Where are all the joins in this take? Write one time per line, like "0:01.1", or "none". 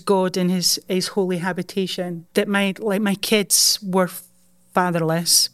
0:02.2